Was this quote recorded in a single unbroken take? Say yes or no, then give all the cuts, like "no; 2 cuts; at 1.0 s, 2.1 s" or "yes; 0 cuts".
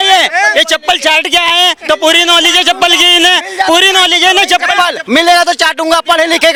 yes; 0 cuts